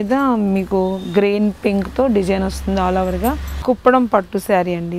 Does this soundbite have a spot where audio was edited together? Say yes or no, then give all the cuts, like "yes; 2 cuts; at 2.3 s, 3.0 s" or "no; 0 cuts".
yes; 1 cut; at 3.5 s